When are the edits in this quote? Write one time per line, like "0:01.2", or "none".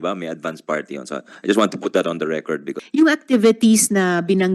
0:02.8